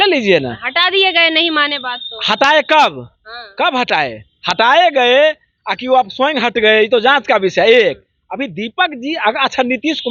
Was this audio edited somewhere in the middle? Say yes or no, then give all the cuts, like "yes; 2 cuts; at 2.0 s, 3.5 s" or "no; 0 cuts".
no; 0 cuts